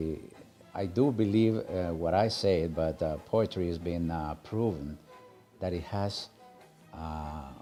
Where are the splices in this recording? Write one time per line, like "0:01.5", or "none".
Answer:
none